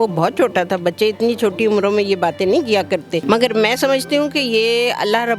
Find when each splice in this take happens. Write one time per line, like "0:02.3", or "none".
0:03.2